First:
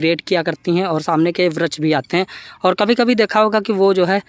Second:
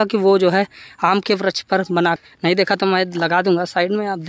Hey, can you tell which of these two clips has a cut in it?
second; 1 cut; at 2.2 s

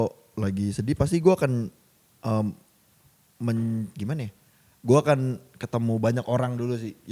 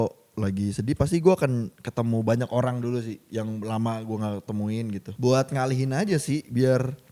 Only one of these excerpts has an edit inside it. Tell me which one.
second; 2 cuts; at 1.8 s, 5.1 s

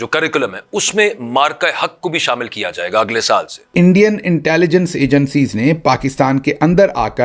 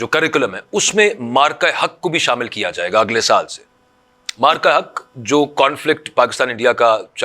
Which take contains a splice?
first; 1 cut; at 3.7 s

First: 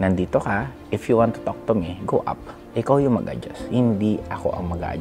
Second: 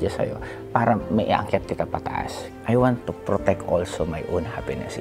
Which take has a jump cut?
second; 1 cut; at 2.4 s

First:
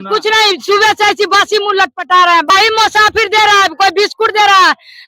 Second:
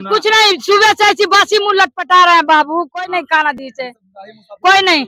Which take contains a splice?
first; 1 cut; at 2.5 s

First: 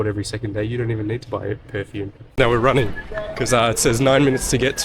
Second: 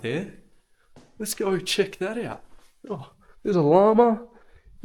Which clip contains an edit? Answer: first; 1 cut; at 2.4 s

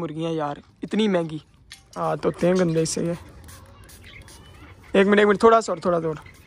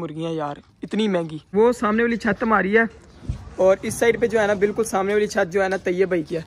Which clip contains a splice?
first; 1 cut; at 1.4 s

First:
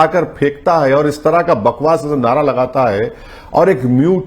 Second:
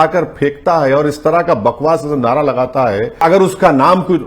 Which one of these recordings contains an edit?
second; 1 cut; at 3.2 s

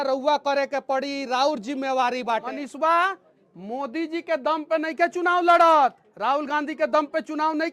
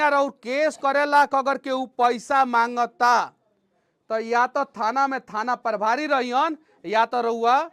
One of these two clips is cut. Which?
first; 1 cut; at 2.5 s

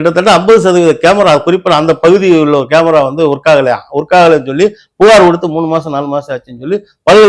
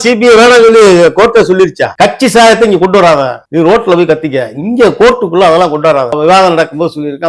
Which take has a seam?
second; 3 cuts; at 1.9 s, 3.4 s, 6.2 s

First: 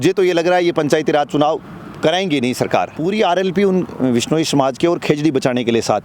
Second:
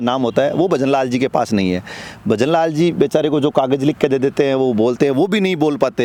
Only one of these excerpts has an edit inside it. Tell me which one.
first; 1 cut; at 2.9 s

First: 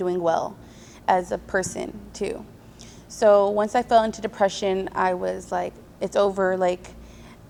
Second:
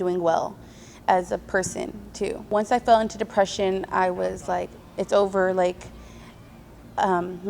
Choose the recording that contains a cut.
second; 1 cut; at 2.5 s

